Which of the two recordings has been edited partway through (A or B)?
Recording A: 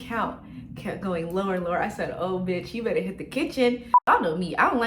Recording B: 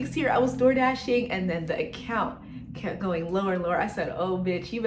A